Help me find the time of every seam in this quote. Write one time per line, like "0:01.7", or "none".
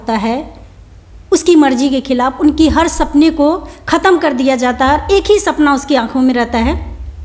none